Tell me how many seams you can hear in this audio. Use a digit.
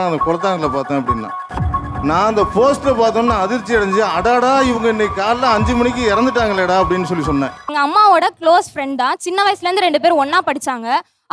1